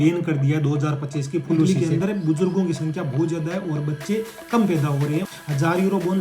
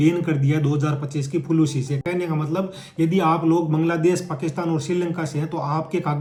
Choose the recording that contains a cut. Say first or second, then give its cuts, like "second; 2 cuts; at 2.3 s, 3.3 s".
first; 2 cuts; at 1.7 s, 5.3 s